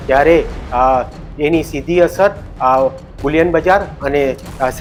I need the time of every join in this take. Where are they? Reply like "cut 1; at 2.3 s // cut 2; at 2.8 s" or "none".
none